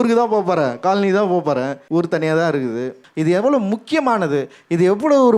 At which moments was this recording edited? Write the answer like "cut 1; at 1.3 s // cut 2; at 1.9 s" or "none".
cut 1; at 1.8 s // cut 2; at 3.0 s